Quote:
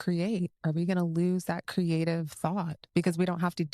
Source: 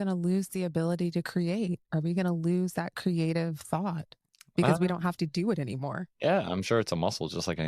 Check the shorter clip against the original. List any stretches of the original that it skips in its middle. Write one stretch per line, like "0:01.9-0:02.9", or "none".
0:04.1-0:04.4